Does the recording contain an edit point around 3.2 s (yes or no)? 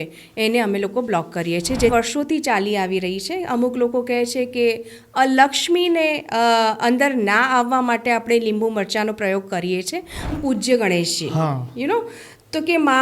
no